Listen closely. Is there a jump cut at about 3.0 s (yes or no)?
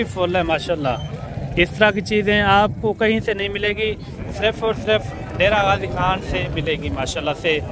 no